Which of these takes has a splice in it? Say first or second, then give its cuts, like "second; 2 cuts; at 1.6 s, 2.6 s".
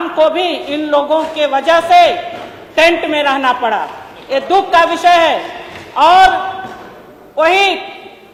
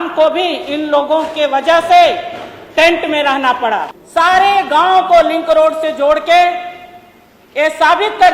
second; 1 cut; at 4.0 s